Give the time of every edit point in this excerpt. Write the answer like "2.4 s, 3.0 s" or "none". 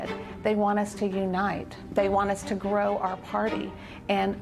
1.7 s

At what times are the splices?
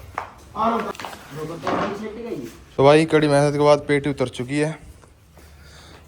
0.9 s, 2.6 s

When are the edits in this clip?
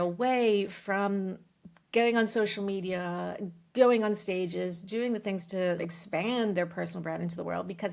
5.8 s

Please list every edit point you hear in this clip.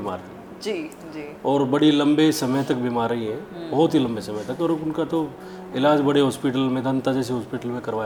none

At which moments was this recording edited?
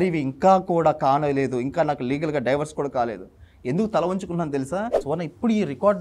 5.0 s

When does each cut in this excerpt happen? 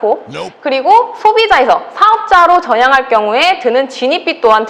none

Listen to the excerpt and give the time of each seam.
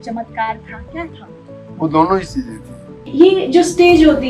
3.1 s

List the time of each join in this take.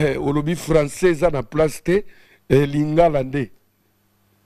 none

